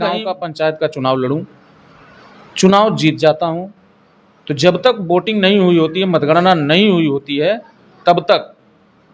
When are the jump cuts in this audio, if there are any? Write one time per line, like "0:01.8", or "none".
none